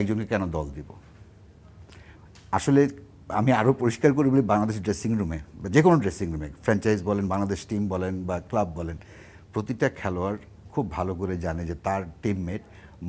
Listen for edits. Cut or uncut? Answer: uncut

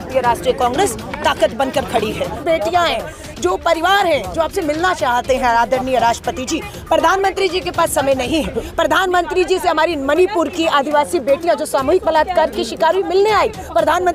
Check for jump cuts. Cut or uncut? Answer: cut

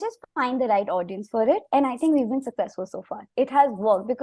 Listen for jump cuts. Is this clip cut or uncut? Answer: uncut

